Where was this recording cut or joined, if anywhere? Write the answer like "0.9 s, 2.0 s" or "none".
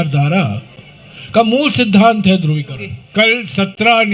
3.0 s

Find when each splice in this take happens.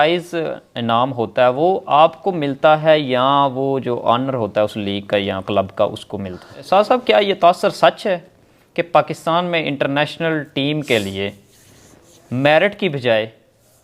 6.7 s

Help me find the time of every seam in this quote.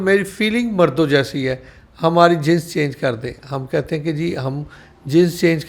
none

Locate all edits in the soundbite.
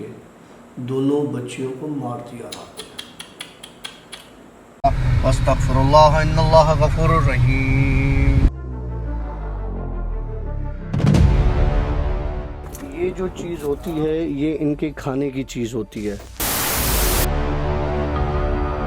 4.7 s

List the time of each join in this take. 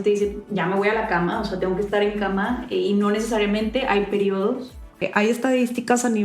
5.0 s

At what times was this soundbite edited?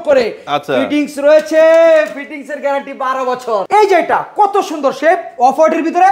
3.7 s

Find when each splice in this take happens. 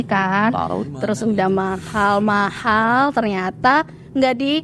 none

